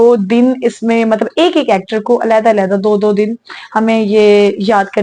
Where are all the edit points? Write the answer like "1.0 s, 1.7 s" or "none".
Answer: none

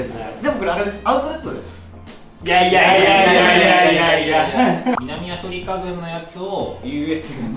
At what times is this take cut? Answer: 5.0 s, 6.8 s

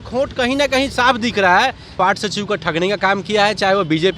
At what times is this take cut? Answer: 2.0 s

